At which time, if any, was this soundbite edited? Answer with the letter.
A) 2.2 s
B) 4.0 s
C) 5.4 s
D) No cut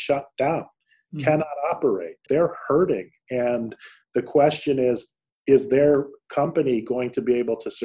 A